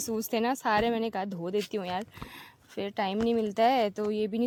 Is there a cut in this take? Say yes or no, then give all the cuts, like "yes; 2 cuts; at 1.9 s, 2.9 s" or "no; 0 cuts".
no; 0 cuts